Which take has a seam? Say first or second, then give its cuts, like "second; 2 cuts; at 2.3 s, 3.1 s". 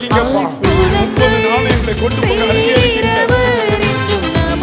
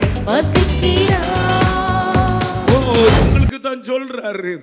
second; 1 cut; at 3.2 s